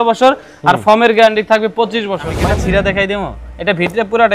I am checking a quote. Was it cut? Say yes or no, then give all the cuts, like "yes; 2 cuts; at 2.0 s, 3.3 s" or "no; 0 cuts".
yes; 1 cut; at 2.3 s